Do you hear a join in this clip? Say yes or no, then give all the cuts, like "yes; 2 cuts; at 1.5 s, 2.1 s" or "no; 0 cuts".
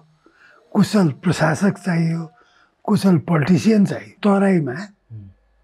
yes; 1 cut; at 4.2 s